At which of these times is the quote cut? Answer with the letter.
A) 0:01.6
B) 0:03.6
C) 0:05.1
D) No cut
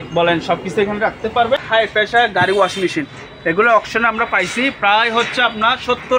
A